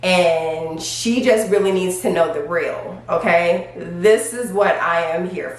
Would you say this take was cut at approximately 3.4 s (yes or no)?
no